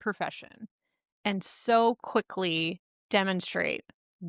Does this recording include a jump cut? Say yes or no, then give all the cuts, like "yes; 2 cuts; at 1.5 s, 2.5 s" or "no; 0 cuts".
yes; 1 cut; at 2.9 s